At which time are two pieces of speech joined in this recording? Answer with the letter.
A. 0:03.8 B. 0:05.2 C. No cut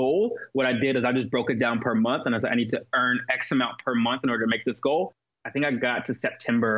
B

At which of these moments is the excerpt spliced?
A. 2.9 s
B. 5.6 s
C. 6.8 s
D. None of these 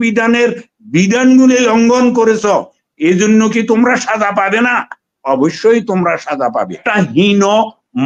C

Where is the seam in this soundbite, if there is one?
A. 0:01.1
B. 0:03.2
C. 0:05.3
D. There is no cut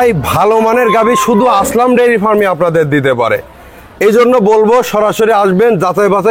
D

